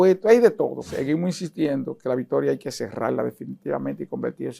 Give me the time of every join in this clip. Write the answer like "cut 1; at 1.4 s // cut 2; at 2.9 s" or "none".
cut 1; at 0.9 s